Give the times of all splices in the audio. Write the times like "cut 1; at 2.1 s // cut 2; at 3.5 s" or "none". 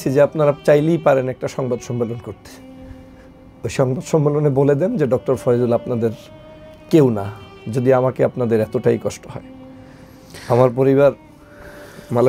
none